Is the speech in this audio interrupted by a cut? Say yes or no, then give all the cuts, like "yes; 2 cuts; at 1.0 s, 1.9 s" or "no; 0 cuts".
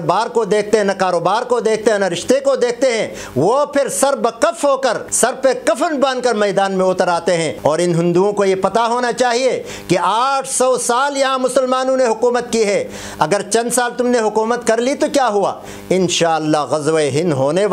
yes; 2 cuts; at 5.1 s, 7.5 s